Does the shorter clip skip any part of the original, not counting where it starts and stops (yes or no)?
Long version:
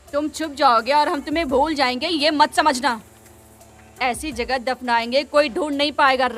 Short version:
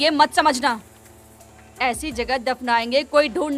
no